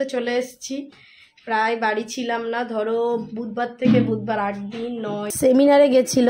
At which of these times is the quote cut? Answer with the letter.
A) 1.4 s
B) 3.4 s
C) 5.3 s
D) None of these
C